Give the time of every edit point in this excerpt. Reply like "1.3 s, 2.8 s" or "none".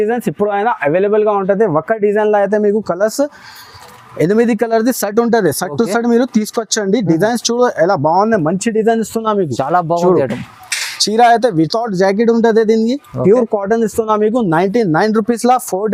none